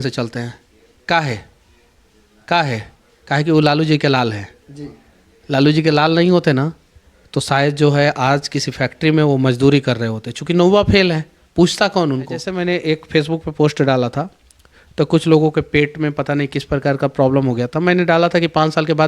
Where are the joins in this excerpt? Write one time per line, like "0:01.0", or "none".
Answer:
0:12.5